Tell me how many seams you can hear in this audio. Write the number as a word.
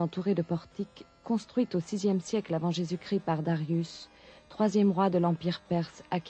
one